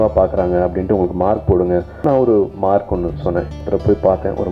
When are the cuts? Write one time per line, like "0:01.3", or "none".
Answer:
0:01.9
0:03.6